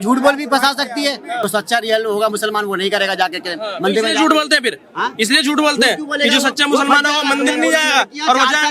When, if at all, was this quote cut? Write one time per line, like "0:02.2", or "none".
0:01.5